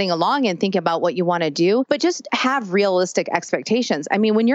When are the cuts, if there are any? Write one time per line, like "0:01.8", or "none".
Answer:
0:01.9